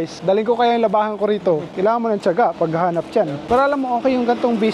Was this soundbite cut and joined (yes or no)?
no